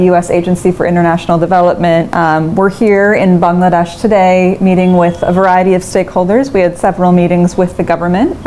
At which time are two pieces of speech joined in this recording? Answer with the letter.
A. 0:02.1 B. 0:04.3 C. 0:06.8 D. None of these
A